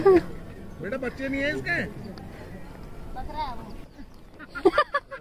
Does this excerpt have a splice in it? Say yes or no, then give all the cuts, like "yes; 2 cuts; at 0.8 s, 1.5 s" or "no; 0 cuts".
no; 0 cuts